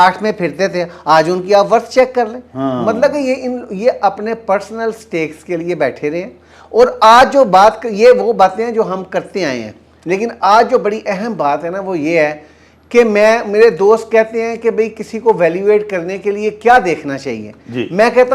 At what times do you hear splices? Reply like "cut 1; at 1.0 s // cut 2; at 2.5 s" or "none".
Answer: none